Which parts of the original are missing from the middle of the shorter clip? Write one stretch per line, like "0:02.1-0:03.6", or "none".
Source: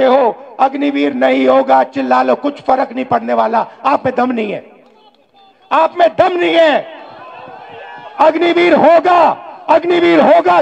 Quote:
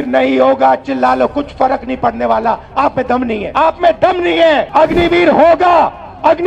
0:04.5-0:05.6
0:06.8-0:08.1